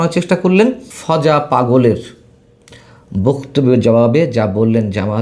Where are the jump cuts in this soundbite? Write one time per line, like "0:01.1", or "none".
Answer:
0:00.9